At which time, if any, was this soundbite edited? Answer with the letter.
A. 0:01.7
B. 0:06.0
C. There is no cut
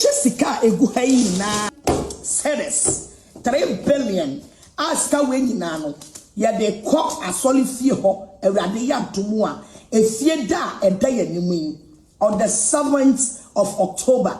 A